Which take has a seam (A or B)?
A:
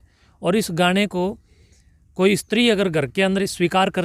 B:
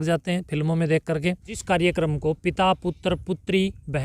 B